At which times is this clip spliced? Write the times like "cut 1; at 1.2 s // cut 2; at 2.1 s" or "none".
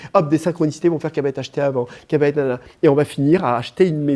none